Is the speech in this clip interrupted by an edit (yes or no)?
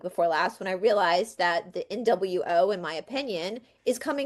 no